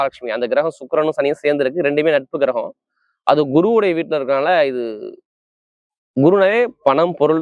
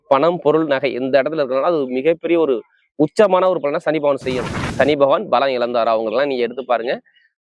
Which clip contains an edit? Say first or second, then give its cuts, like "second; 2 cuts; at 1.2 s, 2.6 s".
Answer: second; 1 cut; at 4.7 s